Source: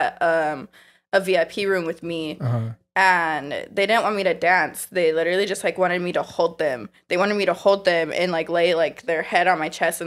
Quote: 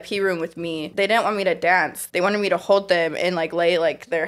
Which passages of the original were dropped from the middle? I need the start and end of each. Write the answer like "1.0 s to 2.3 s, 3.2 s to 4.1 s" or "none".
2.3 s to 3.7 s, 4.8 s to 7.0 s